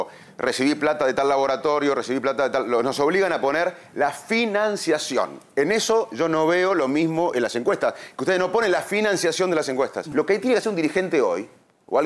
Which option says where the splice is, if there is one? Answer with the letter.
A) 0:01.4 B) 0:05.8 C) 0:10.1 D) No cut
C